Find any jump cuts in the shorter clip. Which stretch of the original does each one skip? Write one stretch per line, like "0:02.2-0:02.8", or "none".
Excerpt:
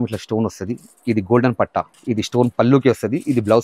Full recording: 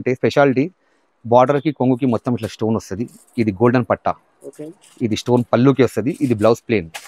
0:04.2-0:04.9